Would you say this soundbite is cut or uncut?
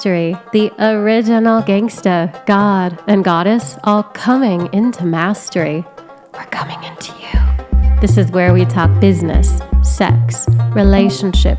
uncut